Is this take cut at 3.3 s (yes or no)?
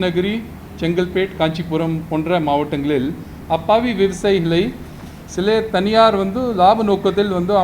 yes